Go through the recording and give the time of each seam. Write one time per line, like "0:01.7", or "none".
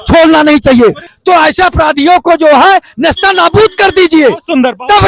0:01.1